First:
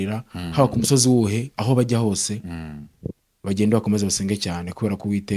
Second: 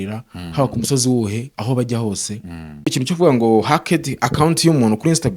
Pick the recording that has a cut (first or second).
second